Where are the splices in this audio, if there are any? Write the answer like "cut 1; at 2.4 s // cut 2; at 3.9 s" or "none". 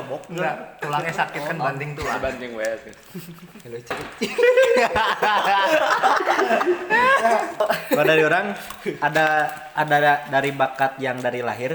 cut 1; at 7.6 s